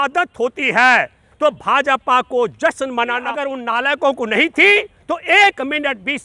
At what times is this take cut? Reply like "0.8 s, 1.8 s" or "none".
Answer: 3.2 s